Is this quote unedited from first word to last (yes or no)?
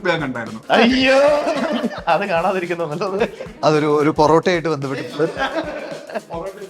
no